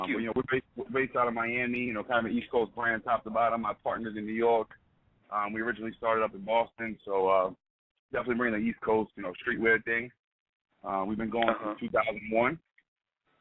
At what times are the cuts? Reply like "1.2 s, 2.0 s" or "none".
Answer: 7.1 s